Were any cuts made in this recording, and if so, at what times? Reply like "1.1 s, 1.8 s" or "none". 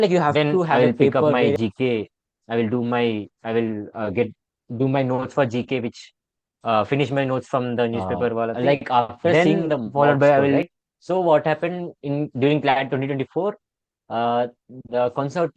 1.4 s, 10.8 s